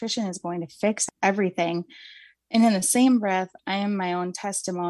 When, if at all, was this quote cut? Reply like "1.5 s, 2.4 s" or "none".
1.0 s